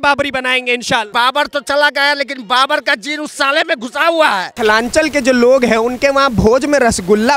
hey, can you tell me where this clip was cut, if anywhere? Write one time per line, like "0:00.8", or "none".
0:01.1
0:04.5